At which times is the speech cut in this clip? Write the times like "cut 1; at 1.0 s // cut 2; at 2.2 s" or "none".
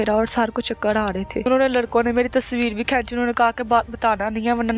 cut 1; at 1.5 s